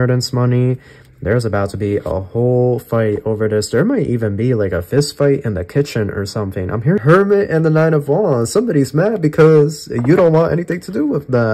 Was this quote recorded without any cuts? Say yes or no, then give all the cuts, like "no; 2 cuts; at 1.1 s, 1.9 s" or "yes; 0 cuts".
no; 1 cut; at 7.0 s